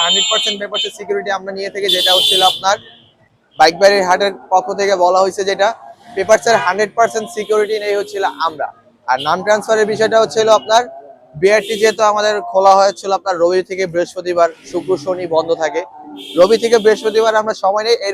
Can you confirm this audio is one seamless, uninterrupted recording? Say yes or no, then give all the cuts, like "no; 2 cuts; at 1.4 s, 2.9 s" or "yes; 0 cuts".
yes; 0 cuts